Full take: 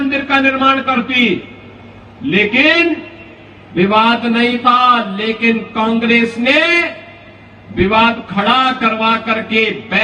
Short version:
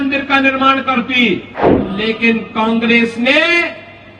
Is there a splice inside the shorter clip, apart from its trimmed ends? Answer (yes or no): yes